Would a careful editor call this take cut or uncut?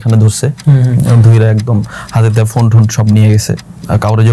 uncut